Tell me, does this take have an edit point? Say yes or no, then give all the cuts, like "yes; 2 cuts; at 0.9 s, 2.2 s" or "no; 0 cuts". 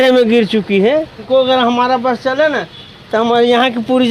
yes; 1 cut; at 1.2 s